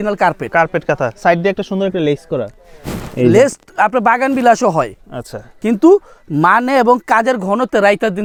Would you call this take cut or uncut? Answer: uncut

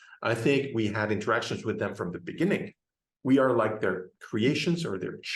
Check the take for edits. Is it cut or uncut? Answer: uncut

